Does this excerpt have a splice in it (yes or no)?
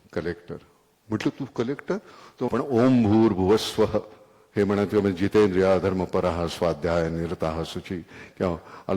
yes